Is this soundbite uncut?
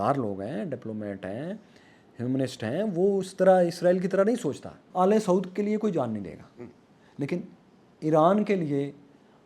no; 1 cut; at 4.8 s

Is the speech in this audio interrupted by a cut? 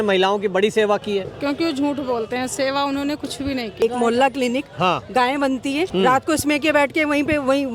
yes; 2 cuts; at 3.8 s, 5.9 s

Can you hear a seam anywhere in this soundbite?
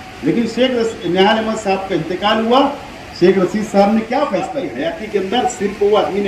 yes; 1 cut; at 4.7 s

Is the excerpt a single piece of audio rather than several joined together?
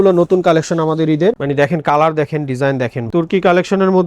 no; 2 cuts; at 1.4 s, 3.0 s

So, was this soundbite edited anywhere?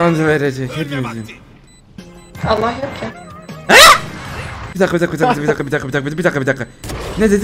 no; 0 cuts

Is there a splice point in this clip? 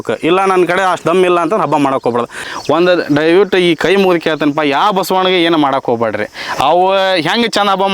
yes; 1 cut; at 2.4 s

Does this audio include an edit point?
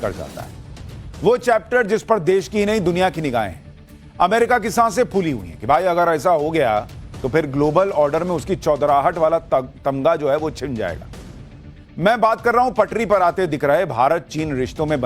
no; 0 cuts

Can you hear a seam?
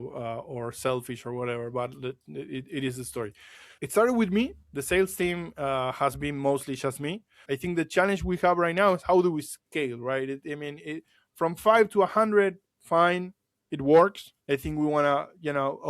yes; 1 cut; at 7.3 s

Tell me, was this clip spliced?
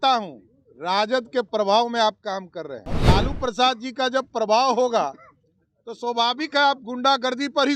yes; 1 cut; at 2.8 s

